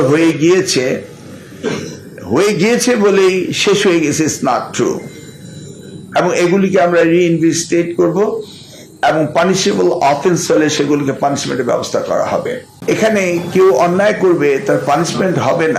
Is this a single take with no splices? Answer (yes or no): no